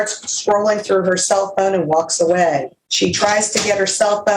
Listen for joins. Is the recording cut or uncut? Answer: cut